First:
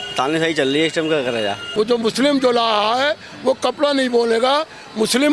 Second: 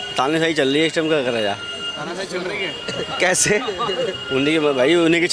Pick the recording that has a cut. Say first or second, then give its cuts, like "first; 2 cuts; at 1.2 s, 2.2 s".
first; 1 cut; at 1.6 s